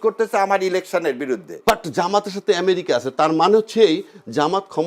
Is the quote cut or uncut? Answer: cut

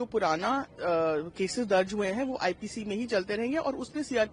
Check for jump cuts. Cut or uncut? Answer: uncut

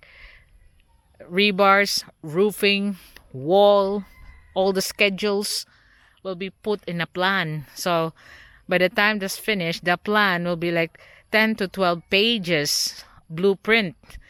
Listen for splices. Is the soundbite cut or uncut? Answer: uncut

